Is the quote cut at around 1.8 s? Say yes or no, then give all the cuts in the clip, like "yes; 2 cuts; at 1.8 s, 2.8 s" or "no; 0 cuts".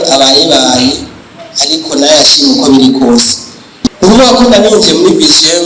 no; 1 cut; at 3.9 s